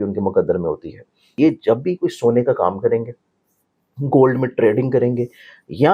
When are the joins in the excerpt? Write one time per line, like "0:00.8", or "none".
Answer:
0:01.3